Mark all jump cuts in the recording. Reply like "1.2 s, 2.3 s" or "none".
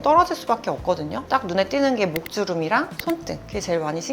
1.3 s